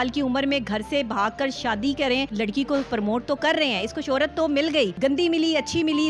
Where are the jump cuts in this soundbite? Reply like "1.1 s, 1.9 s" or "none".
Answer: 2.3 s, 4.9 s